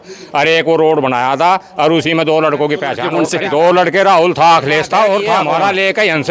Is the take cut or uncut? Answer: cut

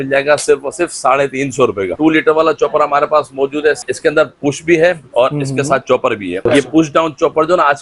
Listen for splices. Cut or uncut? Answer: cut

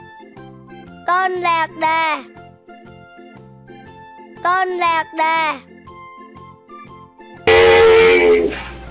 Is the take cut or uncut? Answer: cut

